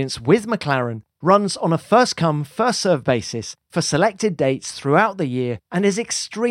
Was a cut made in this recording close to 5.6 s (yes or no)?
yes